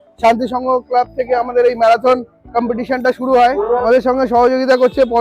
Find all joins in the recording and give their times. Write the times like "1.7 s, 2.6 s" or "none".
3.8 s